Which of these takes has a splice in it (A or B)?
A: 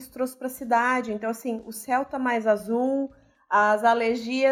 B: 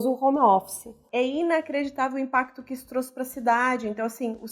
B